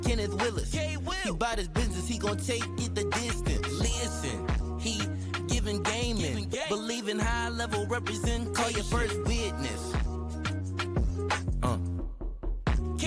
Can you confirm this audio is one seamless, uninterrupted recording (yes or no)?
yes